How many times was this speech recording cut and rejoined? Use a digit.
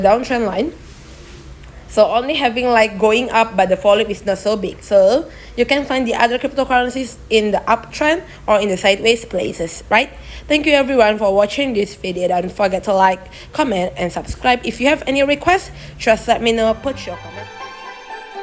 1